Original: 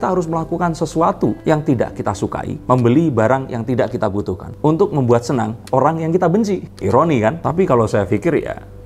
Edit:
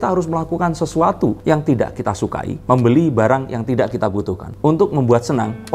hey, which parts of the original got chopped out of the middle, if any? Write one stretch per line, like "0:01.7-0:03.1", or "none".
none